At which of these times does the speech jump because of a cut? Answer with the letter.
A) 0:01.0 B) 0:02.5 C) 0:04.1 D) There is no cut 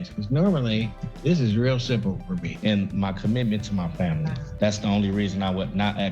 B